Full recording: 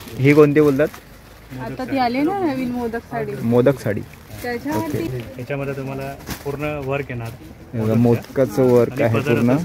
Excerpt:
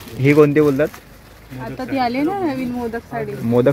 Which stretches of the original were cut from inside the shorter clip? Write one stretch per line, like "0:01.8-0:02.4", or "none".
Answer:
none